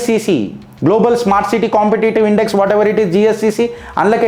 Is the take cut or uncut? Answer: uncut